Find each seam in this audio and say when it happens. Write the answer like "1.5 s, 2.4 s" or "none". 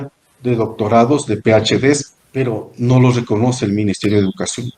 2.2 s